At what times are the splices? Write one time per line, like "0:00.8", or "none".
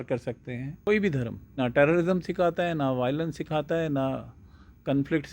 0:00.9
0:01.6